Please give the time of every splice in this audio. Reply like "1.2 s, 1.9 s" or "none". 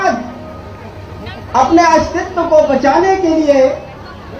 none